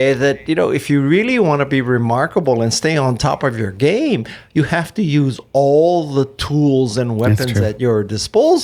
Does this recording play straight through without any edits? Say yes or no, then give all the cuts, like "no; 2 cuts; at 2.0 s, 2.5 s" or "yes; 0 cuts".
yes; 0 cuts